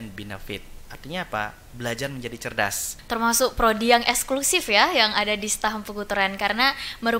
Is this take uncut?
no; 1 cut; at 2.9 s

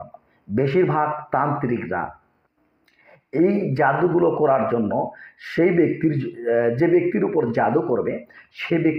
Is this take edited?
no; 0 cuts

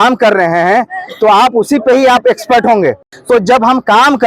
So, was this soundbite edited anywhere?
yes; 1 cut; at 3.1 s

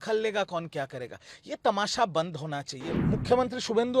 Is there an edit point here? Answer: yes; 1 cut; at 2.9 s

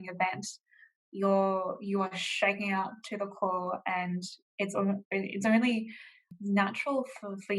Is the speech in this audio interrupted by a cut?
yes; 1 cut; at 6.3 s

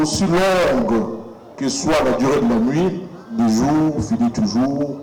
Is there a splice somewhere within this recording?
no; 0 cuts

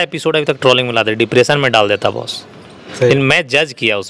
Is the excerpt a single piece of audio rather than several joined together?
yes; 0 cuts

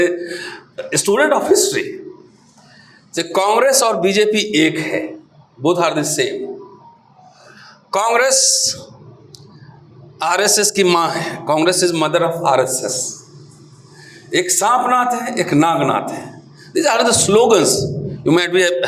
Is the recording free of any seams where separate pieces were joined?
yes; 0 cuts

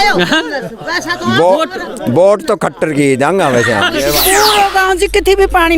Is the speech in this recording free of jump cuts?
no; 1 cut; at 4.2 s

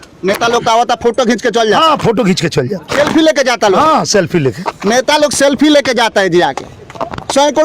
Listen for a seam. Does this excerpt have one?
yes; 1 cut; at 2.8 s

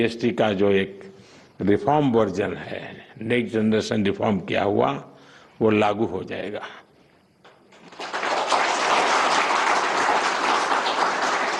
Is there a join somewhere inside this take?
no; 0 cuts

